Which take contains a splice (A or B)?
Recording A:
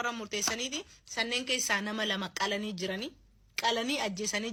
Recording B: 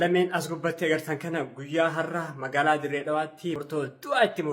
B